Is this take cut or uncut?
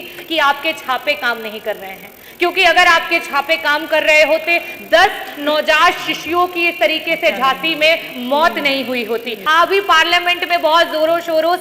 cut